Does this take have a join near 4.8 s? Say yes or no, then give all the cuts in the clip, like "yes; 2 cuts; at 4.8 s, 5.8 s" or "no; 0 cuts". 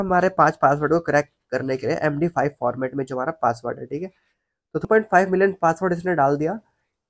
yes; 1 cut; at 4.8 s